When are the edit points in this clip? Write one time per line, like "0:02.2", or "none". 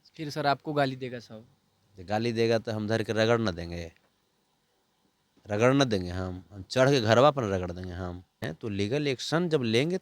0:08.4

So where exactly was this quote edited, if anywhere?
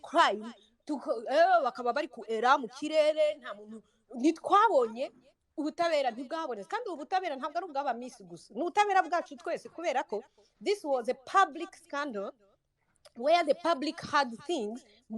none

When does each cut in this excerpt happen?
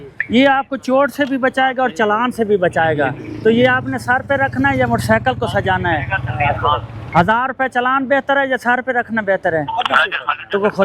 none

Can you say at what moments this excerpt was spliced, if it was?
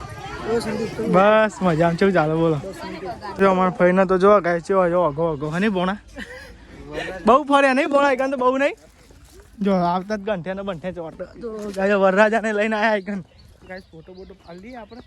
0:03.3

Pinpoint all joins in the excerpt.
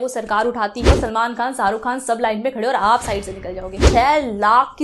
0:00.9
0:03.8

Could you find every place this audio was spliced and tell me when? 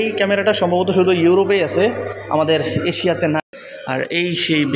0:03.4

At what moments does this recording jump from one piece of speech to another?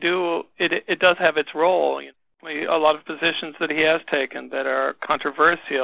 0:02.4

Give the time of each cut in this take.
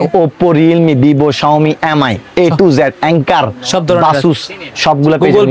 none

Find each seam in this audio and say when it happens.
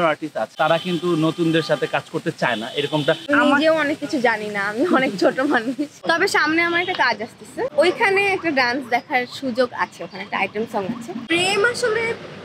0:03.3
0:06.0
0:07.7
0:11.2

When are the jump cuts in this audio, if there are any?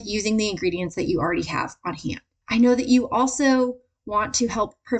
0:02.3

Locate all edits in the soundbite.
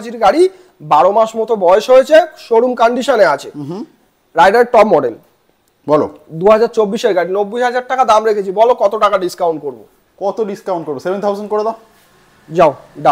none

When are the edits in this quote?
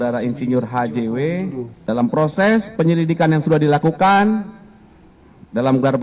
0:01.7

